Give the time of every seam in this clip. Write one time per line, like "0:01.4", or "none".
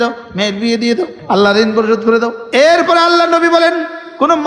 0:01.2
0:02.4